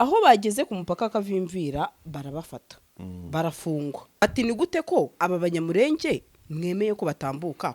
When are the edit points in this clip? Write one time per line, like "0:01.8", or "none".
0:04.2